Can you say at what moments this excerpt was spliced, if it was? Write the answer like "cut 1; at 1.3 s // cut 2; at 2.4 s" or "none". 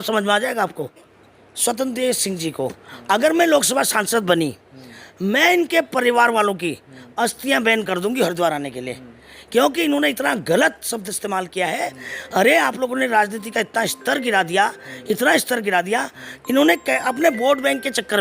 cut 1; at 1.1 s